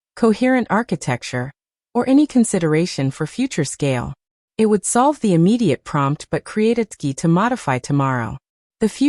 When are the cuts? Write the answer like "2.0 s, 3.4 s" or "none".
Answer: 6.9 s